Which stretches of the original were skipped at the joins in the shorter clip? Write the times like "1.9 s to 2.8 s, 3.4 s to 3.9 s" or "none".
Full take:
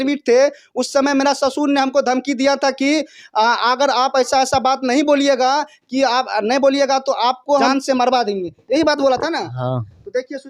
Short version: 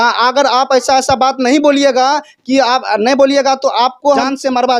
none